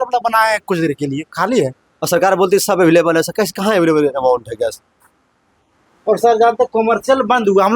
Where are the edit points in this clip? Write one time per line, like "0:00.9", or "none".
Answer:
0:01.9